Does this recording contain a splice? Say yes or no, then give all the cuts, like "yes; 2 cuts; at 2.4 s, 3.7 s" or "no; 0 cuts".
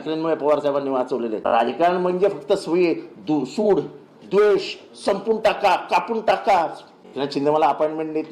yes; 2 cuts; at 1.4 s, 7.0 s